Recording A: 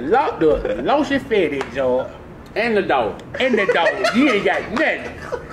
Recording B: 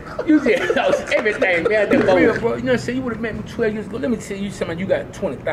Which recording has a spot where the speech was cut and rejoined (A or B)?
B